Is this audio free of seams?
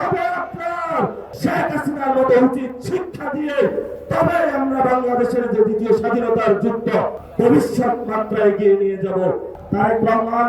no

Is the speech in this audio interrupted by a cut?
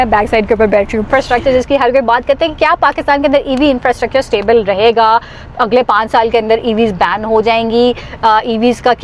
yes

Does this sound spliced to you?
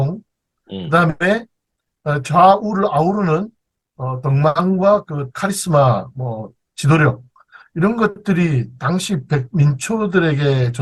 no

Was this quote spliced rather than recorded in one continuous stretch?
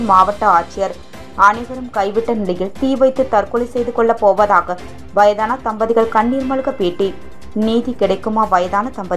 no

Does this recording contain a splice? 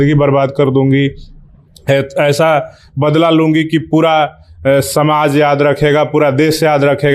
no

